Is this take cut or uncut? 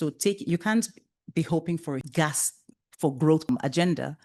cut